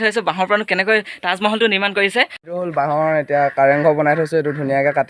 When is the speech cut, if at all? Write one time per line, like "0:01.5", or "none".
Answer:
0:02.4